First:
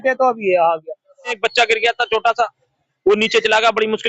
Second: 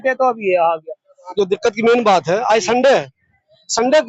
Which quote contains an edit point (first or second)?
first